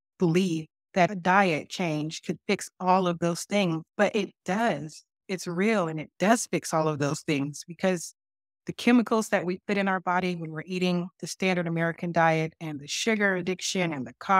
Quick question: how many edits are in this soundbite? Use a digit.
3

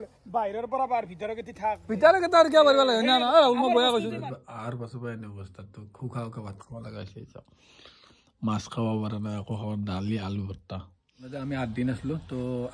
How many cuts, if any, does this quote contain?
2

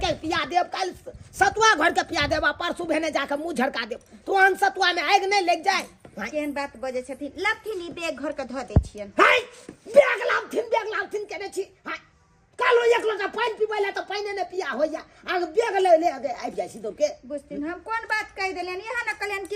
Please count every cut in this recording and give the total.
0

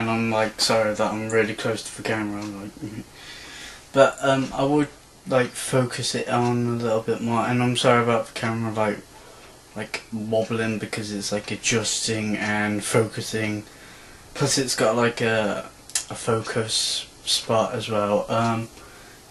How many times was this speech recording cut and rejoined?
0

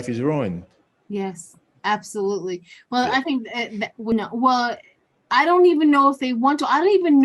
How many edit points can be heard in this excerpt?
1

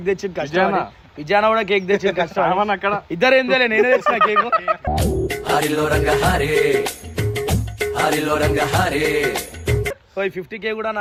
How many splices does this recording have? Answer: 0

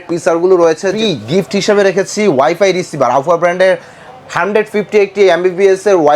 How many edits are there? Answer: 1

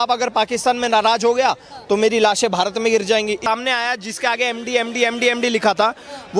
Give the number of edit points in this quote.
1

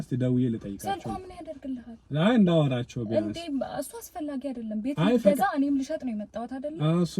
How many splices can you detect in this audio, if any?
0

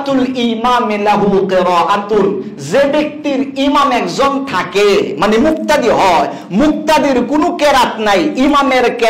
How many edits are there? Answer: 0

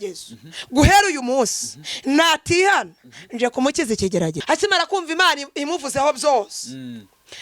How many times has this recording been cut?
1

